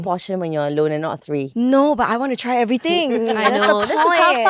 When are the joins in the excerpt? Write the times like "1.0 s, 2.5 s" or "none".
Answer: none